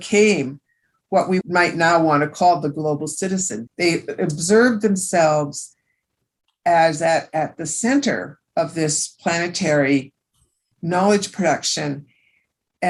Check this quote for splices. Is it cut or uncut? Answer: uncut